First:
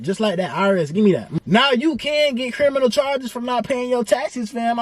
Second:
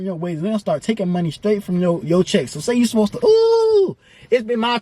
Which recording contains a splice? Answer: first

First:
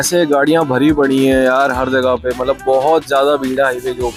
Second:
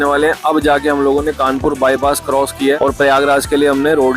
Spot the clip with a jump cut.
second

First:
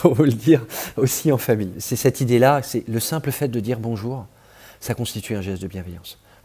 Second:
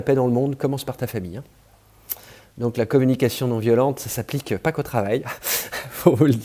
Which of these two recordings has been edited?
first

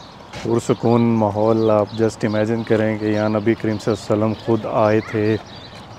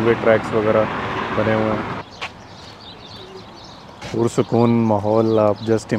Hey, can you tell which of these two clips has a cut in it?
second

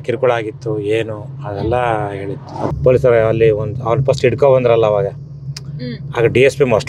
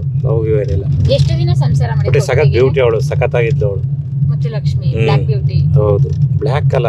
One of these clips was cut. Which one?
first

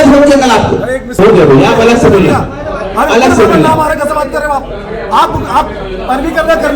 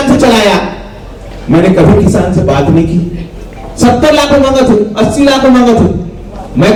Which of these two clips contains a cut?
first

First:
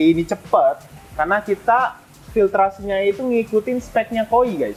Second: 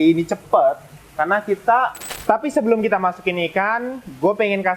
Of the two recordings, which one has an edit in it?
second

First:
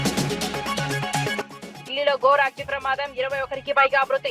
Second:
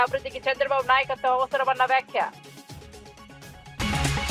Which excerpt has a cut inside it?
first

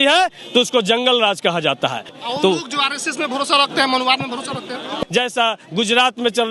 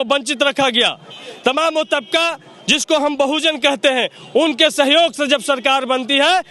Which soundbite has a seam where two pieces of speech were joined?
first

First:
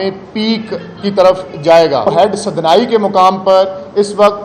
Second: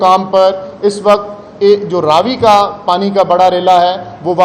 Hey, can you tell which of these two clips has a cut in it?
first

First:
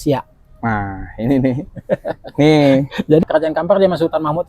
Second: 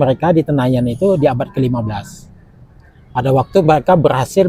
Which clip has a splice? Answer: first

